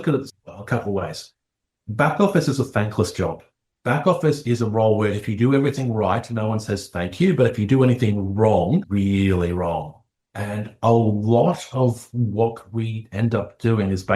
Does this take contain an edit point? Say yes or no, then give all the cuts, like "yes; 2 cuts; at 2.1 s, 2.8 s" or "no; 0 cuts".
yes; 1 cut; at 8.9 s